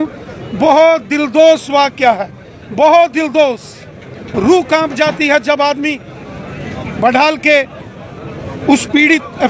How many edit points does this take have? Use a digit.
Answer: 0